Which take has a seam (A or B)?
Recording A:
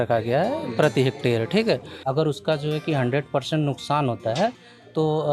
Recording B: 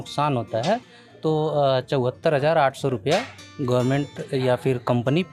A